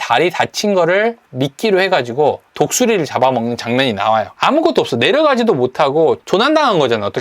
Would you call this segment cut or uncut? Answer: cut